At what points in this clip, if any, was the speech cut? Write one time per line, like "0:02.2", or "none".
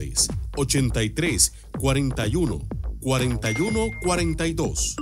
none

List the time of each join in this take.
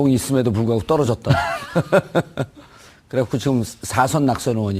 0:02.6

